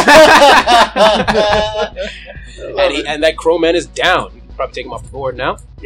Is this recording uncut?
yes; 0 cuts

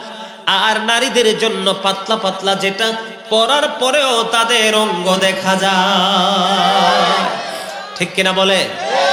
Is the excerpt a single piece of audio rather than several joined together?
yes; 0 cuts

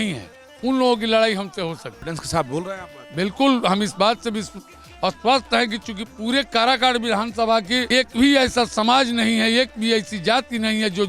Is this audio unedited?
no; 2 cuts; at 1.9 s, 7.9 s

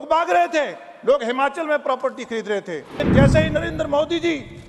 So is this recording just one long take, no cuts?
no; 1 cut; at 3.0 s

